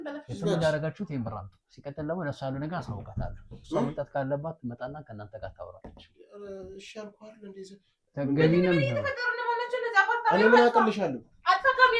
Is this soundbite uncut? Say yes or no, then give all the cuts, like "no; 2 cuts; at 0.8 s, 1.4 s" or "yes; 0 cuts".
no; 1 cut; at 8.0 s